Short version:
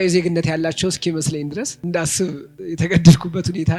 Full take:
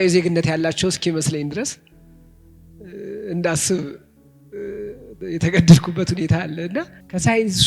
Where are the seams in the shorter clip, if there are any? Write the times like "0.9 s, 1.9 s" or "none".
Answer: 1.8 s, 2.5 s